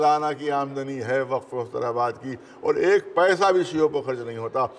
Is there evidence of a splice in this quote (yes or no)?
no